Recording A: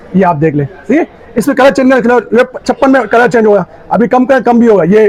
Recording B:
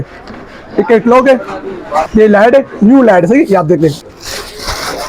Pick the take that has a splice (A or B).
B